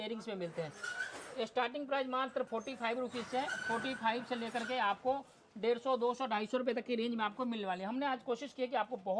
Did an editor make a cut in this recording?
no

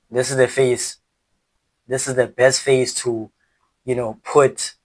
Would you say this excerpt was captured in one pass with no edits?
no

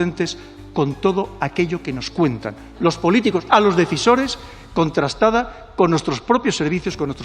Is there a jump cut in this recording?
yes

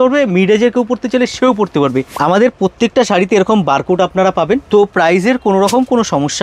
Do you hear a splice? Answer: yes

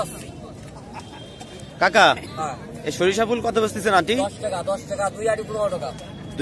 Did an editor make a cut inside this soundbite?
no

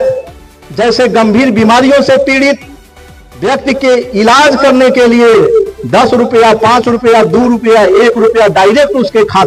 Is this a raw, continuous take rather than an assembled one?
yes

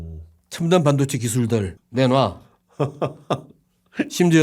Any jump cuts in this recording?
yes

